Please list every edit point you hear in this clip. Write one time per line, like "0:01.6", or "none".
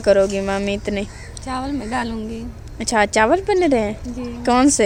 none